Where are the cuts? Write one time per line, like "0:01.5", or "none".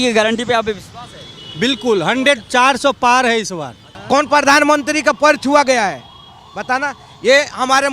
0:03.9